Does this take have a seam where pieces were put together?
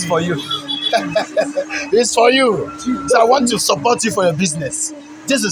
no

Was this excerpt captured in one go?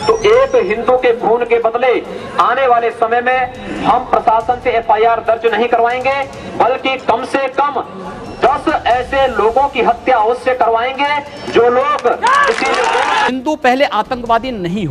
no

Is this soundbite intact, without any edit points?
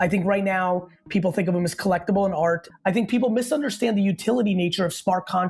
no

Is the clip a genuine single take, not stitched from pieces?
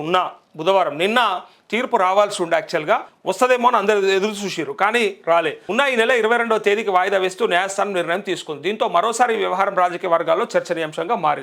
no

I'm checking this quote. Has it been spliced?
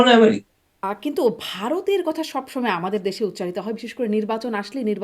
yes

